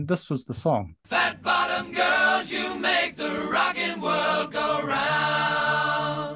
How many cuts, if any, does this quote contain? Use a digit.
1